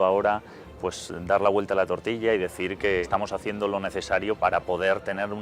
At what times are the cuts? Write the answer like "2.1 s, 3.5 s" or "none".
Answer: 3.0 s, 4.4 s